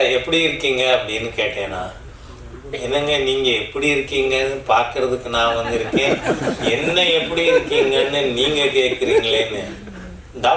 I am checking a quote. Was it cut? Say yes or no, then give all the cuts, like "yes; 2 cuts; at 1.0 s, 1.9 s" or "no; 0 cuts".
no; 0 cuts